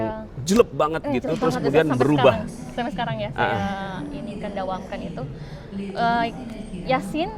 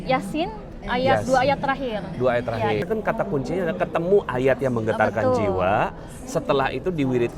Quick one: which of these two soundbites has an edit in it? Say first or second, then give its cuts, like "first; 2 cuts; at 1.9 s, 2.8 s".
second; 1 cut; at 2.8 s